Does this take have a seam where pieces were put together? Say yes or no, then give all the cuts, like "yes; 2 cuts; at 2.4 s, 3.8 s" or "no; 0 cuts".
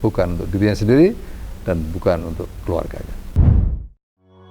yes; 1 cut; at 3.2 s